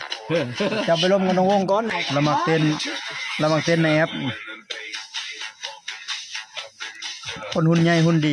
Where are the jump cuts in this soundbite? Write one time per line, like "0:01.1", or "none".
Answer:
0:01.9